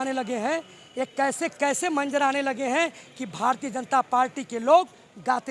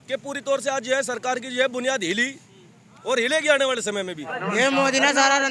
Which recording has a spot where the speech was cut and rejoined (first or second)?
second